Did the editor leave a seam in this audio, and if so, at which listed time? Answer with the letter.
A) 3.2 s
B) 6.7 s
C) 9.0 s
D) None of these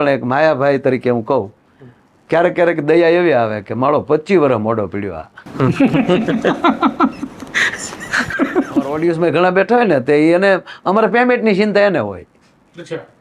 C